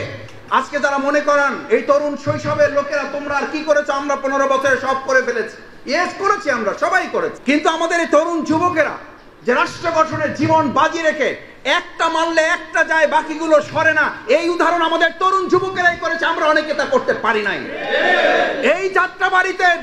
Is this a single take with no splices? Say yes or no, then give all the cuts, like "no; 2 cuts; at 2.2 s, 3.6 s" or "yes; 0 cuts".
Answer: yes; 0 cuts